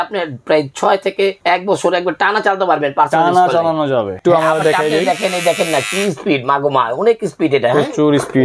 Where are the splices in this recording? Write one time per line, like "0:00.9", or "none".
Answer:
0:01.4
0:04.2